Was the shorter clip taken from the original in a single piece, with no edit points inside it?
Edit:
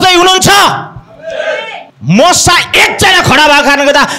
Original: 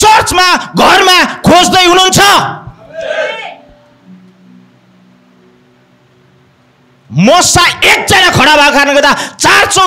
no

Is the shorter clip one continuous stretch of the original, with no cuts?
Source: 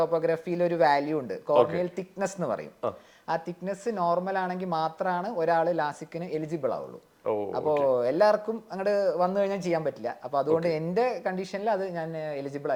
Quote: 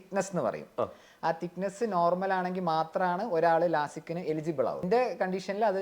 no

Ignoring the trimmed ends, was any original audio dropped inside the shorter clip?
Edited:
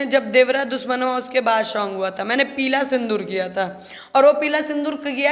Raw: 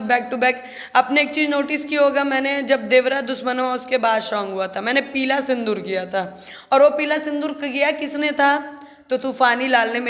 no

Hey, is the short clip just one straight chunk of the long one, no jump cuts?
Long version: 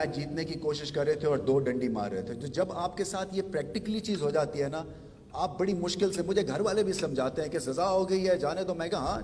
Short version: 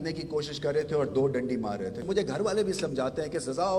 no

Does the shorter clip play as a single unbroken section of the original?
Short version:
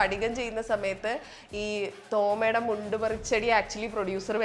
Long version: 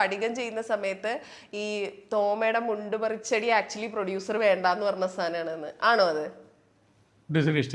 yes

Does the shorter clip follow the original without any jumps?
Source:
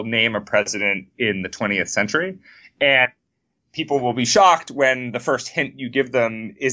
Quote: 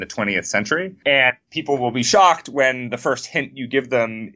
no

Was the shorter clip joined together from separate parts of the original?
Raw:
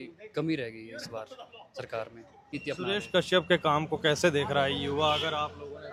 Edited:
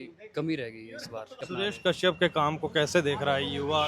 yes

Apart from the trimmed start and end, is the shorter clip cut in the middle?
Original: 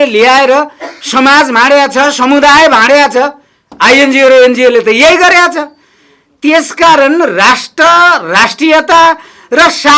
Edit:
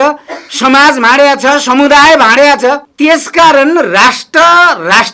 yes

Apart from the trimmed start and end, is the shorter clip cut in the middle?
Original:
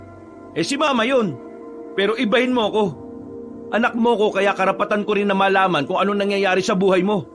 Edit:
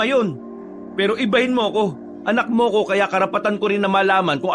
yes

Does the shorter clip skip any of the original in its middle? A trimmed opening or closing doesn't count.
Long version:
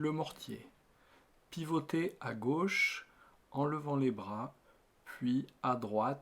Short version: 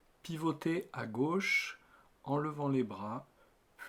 no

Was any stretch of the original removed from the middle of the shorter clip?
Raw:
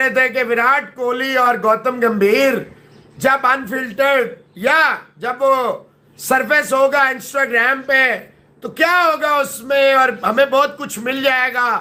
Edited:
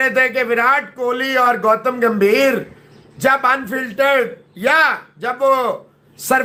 no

